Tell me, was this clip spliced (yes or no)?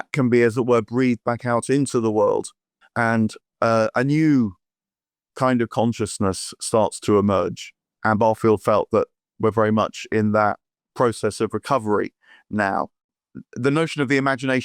yes